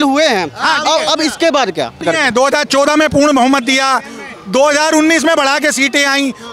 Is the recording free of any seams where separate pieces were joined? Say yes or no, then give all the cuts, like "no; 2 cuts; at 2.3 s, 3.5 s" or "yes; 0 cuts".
no; 1 cut; at 2.0 s